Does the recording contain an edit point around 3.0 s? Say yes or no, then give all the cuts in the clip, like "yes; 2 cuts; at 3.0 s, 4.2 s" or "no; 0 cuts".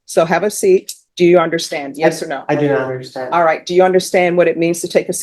no; 1 cut; at 1.0 s